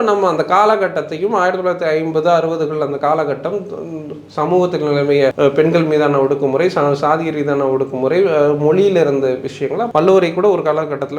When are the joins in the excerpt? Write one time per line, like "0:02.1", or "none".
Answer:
0:05.3
0:09.8